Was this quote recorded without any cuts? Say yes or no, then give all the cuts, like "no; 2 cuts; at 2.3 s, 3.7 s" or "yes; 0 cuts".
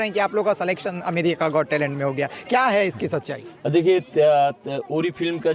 yes; 0 cuts